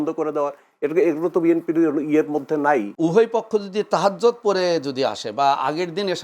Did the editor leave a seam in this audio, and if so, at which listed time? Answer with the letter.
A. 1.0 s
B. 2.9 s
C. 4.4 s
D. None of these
B